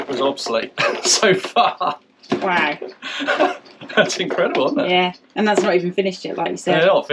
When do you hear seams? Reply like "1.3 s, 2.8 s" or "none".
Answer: none